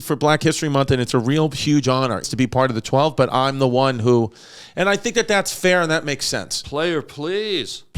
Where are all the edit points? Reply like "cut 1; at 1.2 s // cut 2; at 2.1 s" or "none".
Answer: cut 1; at 2.2 s